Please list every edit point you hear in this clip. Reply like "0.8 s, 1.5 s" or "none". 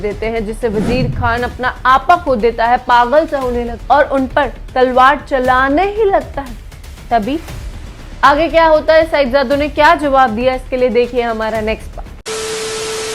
none